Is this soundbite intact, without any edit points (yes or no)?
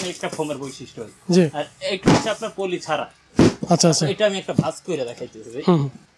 yes